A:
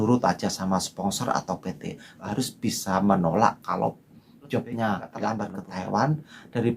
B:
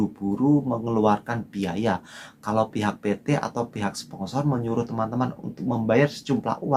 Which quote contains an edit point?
A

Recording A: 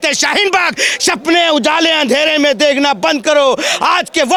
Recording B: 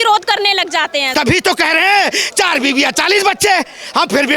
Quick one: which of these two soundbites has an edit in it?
B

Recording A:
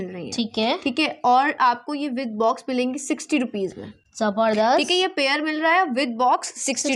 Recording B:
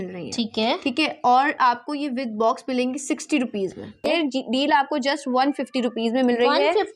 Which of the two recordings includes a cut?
B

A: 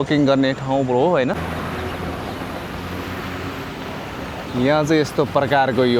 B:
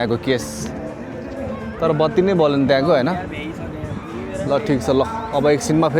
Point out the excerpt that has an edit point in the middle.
A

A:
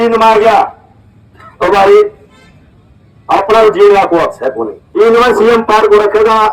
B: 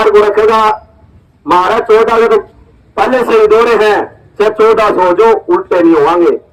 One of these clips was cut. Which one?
A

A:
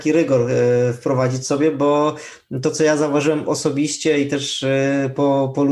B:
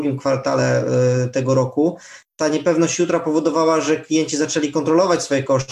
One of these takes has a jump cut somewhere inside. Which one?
B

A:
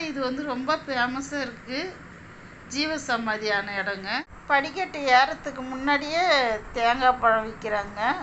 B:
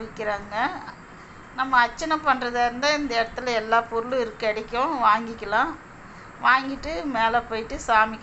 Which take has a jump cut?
A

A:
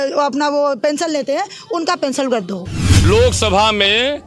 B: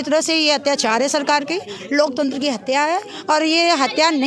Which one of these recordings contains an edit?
A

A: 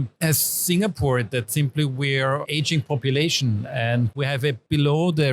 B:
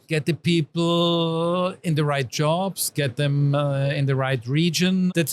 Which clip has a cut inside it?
A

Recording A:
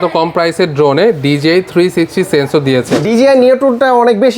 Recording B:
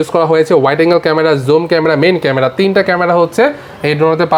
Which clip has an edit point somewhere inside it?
A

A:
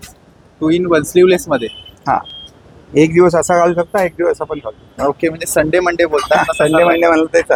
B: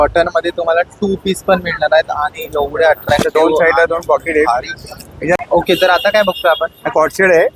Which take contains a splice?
B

